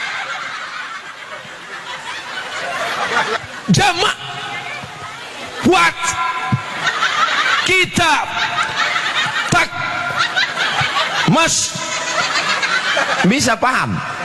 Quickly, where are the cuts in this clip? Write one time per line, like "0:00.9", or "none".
0:03.4